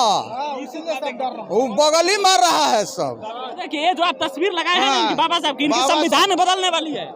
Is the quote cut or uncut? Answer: cut